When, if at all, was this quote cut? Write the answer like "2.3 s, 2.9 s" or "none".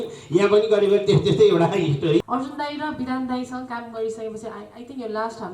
2.2 s